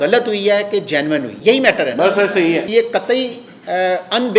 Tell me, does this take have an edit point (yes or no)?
yes